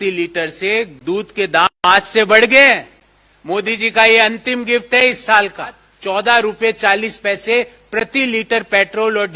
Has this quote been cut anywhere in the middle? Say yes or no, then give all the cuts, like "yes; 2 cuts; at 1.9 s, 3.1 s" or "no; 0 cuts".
yes; 1 cut; at 5.9 s